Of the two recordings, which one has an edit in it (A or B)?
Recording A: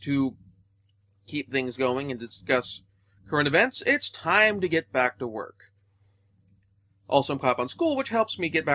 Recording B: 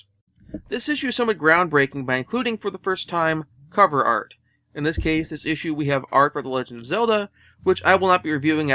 B